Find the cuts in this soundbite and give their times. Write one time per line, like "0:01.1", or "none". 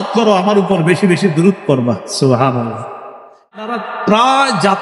0:03.6